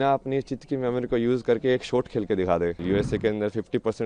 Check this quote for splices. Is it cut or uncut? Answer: cut